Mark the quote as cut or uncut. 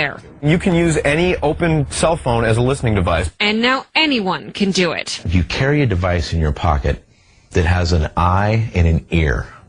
cut